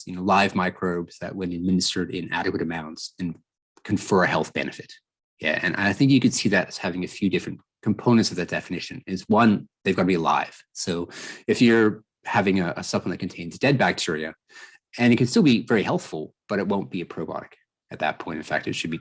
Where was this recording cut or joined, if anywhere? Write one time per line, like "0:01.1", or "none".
none

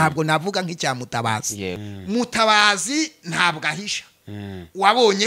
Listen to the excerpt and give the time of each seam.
0:01.8

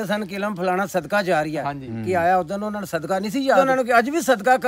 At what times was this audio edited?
0:03.6

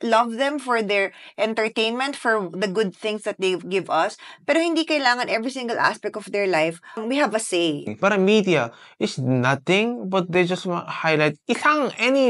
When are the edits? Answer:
0:07.0
0:07.9

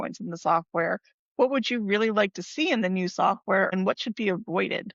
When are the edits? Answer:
0:03.7

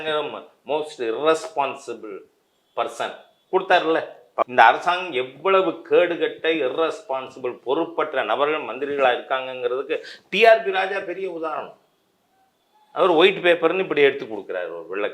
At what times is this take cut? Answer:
0:04.4

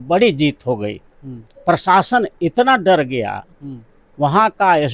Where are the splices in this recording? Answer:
0:01.5

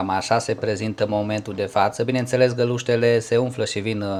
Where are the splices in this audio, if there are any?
none

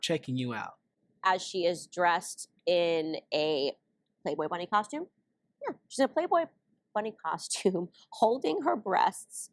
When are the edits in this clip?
none

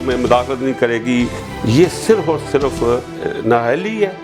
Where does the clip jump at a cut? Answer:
0:01.5
0:03.2

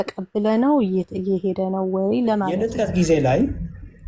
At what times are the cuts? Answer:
0:02.6

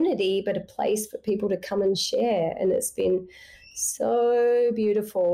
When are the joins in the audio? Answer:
none

